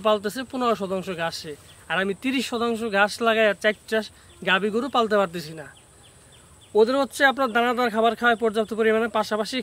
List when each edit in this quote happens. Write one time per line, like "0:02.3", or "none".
none